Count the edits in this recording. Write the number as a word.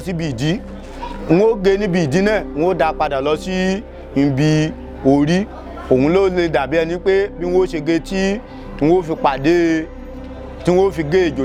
zero